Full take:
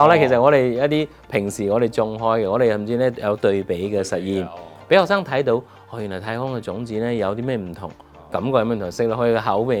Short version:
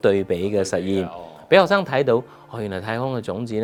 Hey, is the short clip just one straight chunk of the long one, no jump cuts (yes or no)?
yes